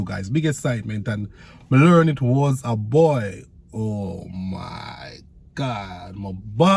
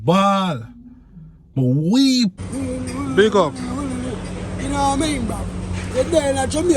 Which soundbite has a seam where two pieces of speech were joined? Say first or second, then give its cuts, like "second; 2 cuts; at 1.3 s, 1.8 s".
second; 1 cut; at 2.5 s